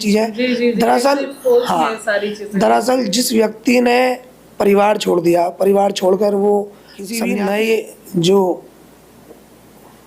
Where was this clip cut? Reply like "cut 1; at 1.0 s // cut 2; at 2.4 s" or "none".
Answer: cut 1; at 7.2 s